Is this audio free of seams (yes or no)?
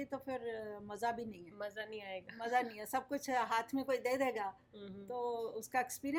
yes